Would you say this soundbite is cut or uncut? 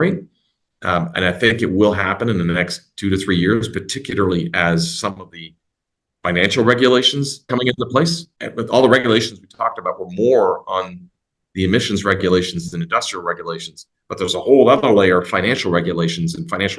cut